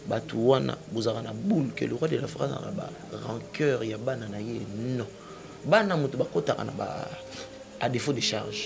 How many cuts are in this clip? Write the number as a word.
zero